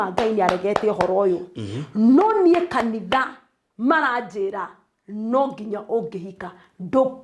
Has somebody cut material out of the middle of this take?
no; 0 cuts

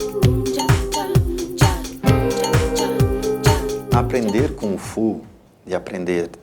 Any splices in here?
yes; 1 cut; at 4.0 s

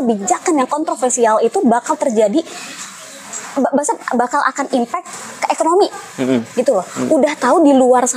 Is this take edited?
no; 0 cuts

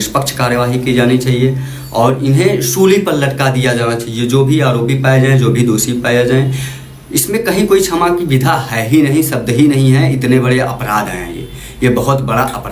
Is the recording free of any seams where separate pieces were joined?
yes; 0 cuts

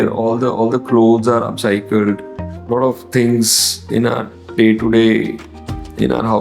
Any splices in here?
yes; 1 cut; at 2.6 s

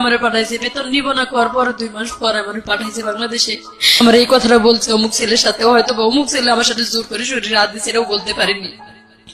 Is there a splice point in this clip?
yes; 1 cut; at 4.0 s

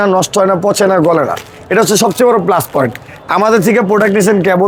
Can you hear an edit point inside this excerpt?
no; 0 cuts

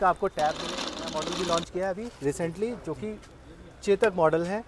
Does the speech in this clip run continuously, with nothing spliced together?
no; 1 cut; at 1.2 s

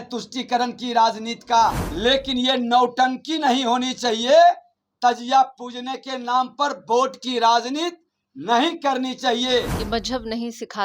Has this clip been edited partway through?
yes; 2 cuts; at 1.9 s, 9.8 s

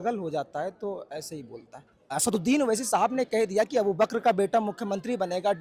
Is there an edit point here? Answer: yes; 1 cut; at 1.9 s

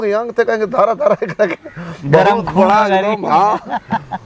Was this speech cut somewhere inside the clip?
no; 0 cuts

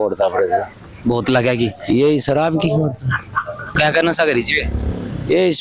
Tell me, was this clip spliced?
yes; 1 cut; at 3.7 s

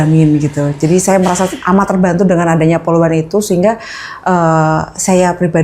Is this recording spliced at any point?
no; 0 cuts

